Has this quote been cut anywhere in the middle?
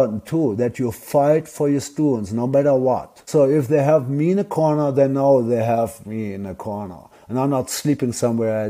no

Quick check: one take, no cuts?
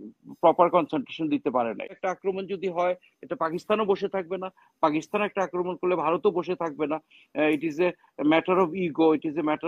no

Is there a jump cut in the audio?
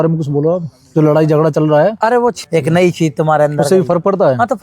yes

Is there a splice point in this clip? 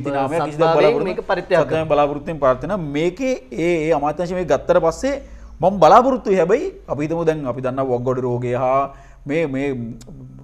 no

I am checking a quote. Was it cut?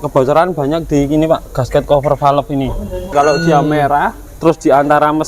yes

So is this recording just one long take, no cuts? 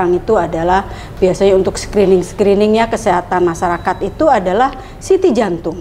yes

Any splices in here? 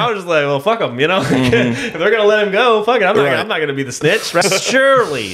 yes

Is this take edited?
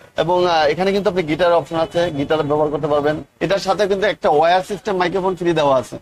yes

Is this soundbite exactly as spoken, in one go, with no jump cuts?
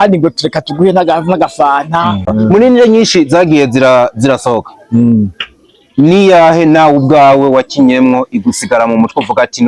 no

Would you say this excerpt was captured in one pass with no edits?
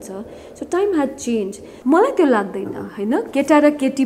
no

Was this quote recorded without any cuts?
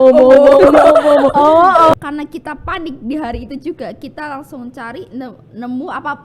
no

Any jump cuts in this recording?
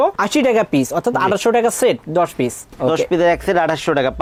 no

